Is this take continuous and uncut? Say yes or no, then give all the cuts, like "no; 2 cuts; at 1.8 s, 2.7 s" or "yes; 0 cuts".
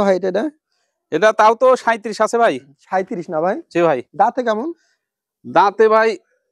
yes; 0 cuts